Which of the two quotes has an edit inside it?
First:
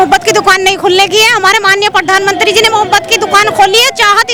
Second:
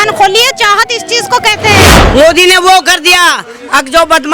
second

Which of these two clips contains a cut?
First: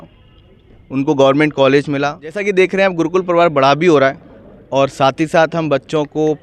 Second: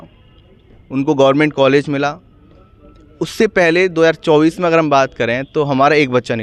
first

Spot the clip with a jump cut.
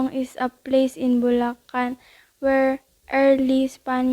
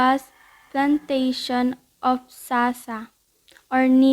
second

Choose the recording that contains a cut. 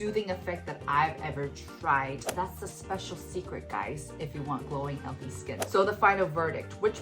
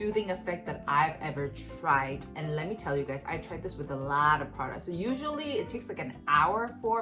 first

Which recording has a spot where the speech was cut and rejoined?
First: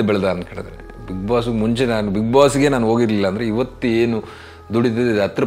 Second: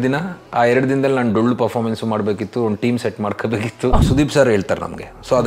second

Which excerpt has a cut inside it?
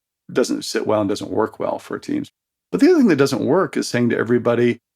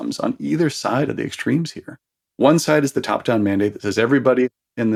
first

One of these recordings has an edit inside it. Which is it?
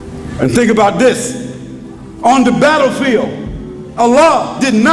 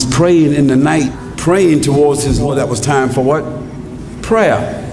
second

